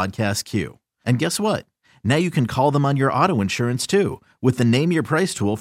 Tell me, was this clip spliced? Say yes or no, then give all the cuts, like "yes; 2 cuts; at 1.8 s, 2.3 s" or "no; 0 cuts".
no; 0 cuts